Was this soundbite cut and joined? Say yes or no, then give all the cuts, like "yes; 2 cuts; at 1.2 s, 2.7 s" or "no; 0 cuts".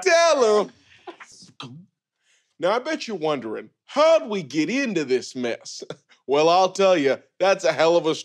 yes; 1 cut; at 1.3 s